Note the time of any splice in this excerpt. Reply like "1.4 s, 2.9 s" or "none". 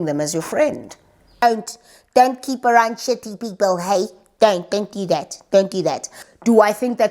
1.2 s, 6.1 s